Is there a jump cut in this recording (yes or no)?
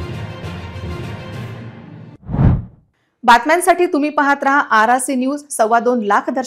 no